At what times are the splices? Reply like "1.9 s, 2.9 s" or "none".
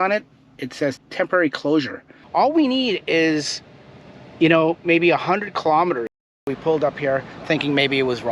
1.0 s, 2.2 s, 6.3 s